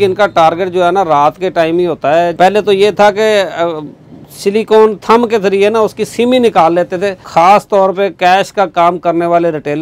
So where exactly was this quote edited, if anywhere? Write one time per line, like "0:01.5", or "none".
0:02.3
0:07.3